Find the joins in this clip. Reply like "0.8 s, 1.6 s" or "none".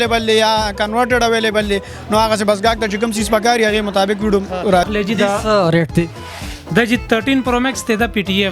4.9 s